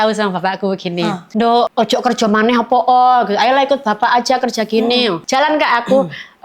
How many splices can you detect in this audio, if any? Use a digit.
2